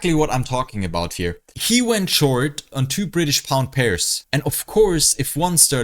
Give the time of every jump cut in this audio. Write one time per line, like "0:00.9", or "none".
0:04.1